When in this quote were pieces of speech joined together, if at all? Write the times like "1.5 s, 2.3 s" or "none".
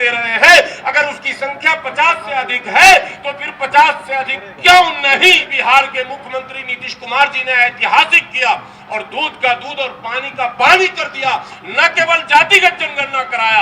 5.5 s